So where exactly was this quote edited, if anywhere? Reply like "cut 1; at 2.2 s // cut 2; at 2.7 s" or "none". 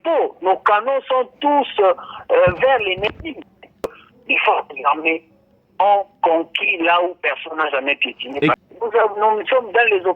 cut 1; at 4.0 s // cut 2; at 8.6 s